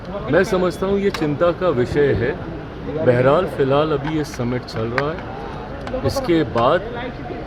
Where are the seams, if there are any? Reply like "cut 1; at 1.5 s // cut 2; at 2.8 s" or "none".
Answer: none